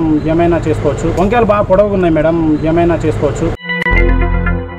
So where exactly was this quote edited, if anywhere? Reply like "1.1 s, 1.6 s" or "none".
1.1 s, 3.4 s